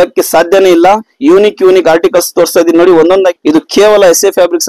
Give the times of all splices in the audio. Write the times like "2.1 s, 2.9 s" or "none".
1.1 s, 3.3 s